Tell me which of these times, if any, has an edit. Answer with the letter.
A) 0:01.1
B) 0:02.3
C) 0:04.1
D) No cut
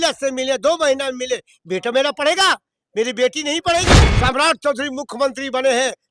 C